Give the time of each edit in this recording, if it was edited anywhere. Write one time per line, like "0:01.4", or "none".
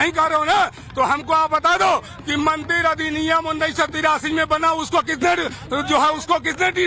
0:05.6